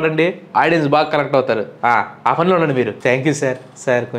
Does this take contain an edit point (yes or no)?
no